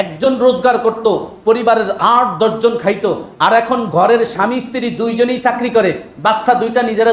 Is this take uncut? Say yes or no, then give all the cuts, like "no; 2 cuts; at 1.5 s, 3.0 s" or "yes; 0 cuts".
yes; 0 cuts